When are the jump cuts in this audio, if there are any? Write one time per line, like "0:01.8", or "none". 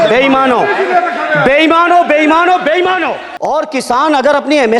0:03.2